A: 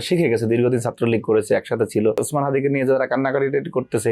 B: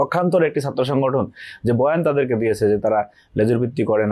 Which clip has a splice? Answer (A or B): A